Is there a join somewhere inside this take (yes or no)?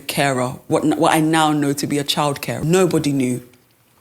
yes